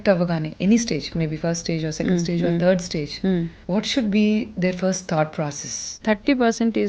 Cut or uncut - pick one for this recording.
cut